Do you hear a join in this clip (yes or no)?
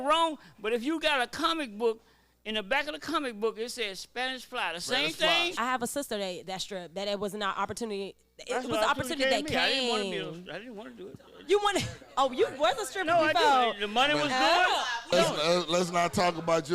yes